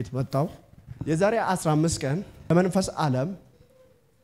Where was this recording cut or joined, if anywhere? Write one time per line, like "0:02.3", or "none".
0:02.5